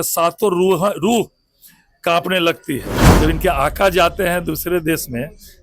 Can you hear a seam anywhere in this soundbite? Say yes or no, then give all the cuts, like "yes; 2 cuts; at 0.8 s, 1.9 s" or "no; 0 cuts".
yes; 1 cut; at 3.0 s